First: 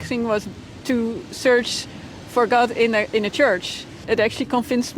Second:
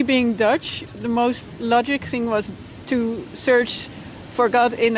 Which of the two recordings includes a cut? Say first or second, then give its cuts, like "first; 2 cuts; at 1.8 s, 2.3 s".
first; 1 cut; at 4.0 s